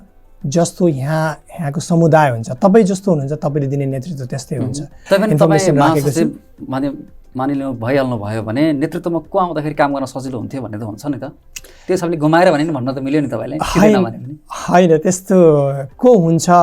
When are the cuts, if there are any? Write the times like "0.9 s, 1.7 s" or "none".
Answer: 4.9 s